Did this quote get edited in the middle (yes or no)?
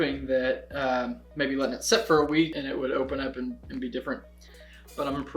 yes